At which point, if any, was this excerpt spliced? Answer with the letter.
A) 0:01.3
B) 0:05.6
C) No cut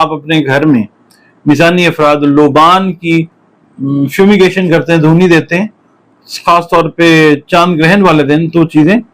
C